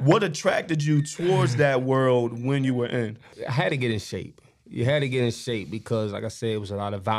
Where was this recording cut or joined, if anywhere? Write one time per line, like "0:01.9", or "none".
0:03.4